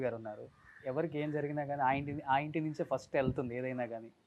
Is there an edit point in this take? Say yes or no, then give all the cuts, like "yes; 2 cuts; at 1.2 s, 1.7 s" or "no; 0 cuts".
no; 0 cuts